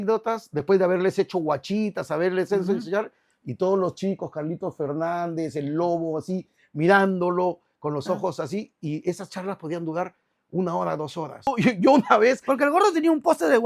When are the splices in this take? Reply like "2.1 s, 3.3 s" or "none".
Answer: 11.5 s